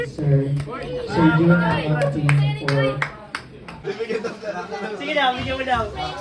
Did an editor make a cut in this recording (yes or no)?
yes